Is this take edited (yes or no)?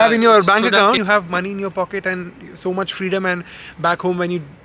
yes